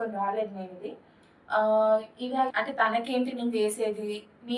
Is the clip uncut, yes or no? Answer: no